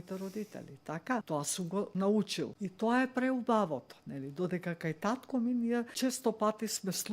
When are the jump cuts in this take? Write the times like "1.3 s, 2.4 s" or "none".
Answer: 1.7 s, 2.5 s, 5.9 s